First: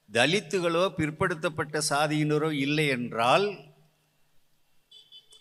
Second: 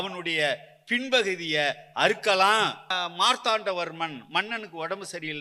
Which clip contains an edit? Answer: second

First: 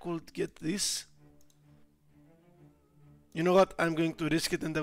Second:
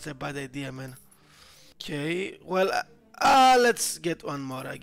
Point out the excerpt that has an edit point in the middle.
second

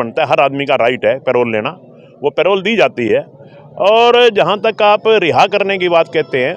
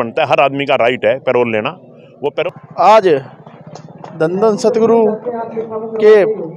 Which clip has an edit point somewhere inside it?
second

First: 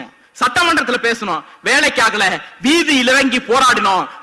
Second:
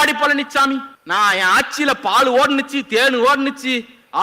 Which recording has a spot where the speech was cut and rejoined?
second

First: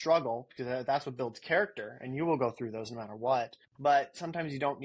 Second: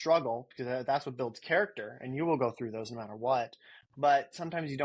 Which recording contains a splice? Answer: first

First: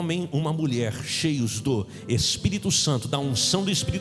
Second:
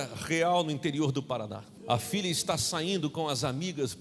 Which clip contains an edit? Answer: second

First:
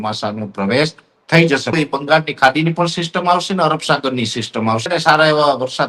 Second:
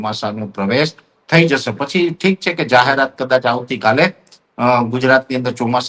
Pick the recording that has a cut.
first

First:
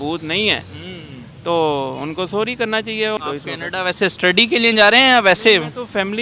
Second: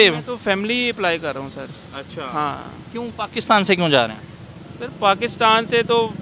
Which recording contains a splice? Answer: first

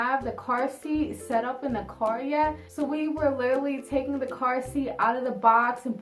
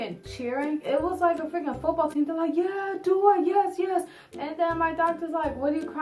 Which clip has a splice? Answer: second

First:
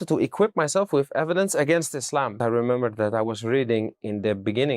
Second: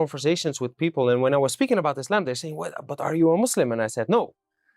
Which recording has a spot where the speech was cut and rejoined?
first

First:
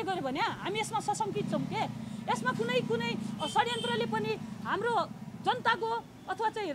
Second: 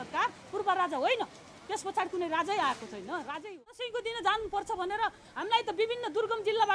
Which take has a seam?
second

